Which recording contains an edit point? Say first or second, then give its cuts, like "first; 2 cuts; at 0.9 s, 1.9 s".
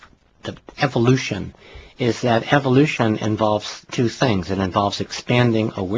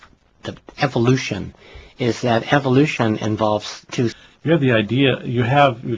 first; 1 cut; at 4.1 s